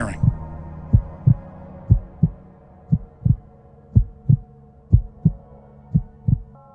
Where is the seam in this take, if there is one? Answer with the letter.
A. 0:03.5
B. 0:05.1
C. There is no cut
C